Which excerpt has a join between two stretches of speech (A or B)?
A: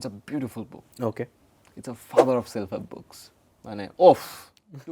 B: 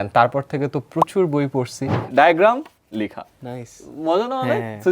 B